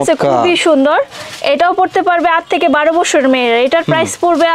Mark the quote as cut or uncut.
uncut